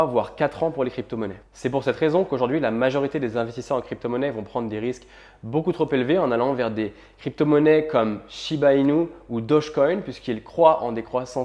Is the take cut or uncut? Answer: uncut